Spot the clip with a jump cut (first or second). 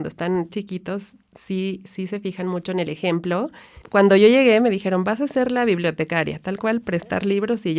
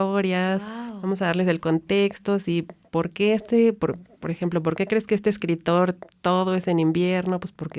first